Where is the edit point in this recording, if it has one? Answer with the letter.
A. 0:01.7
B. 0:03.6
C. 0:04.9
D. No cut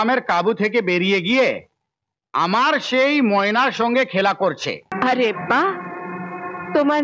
C